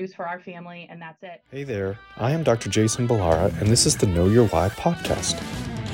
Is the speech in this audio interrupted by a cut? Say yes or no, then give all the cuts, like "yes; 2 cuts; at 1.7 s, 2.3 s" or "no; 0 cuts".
yes; 1 cut; at 1.3 s